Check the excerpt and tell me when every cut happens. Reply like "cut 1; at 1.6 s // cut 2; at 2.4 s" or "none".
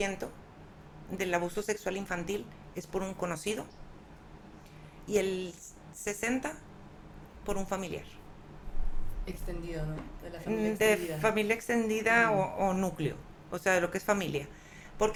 none